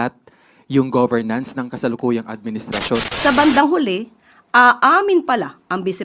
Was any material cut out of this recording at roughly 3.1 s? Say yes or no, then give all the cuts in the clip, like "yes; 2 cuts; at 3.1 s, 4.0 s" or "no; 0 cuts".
yes; 1 cut; at 3.1 s